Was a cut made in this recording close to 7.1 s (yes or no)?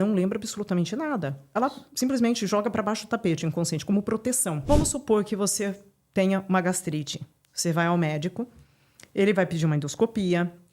no